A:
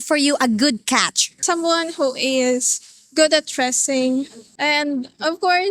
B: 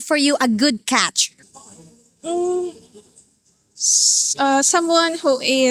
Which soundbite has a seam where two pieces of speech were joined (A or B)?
A